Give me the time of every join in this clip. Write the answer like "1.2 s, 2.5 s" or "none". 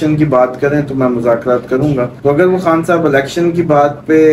2.1 s